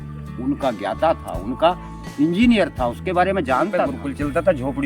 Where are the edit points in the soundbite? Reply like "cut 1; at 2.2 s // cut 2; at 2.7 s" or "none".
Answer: cut 1; at 4.0 s